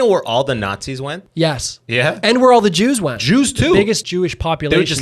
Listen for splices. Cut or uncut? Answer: cut